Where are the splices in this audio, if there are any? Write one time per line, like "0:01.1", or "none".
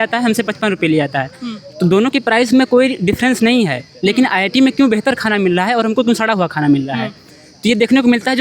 none